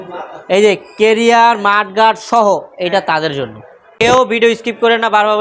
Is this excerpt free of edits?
no; 1 cut; at 3.9 s

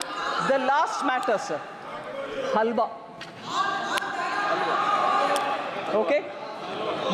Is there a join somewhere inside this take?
no; 0 cuts

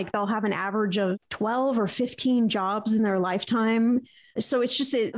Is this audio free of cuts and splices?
yes; 0 cuts

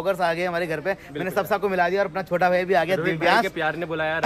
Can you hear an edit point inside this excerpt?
no; 0 cuts

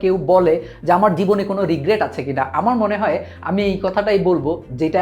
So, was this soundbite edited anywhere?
no; 0 cuts

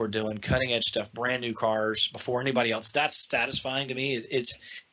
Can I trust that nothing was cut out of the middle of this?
yes; 0 cuts

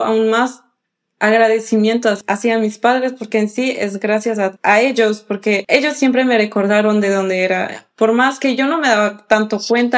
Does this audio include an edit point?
yes; 3 cuts; at 2.2 s, 4.6 s, 5.6 s

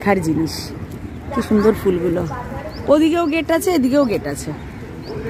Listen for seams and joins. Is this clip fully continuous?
yes; 0 cuts

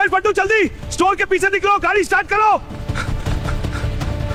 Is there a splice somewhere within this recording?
no; 0 cuts

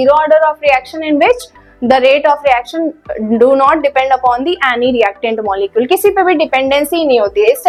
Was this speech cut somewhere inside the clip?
no; 0 cuts

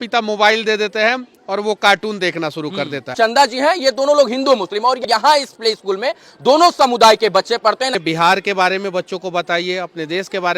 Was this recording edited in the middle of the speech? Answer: yes; 3 cuts; at 3.1 s, 5.0 s, 8.0 s

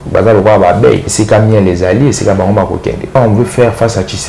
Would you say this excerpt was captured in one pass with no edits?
no; 2 cuts; at 1.1 s, 3.2 s

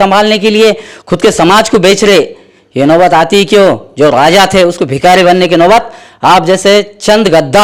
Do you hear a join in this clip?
no; 0 cuts

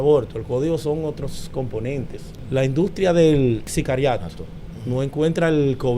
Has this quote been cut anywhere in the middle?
yes; 2 cuts; at 2.2 s, 3.7 s

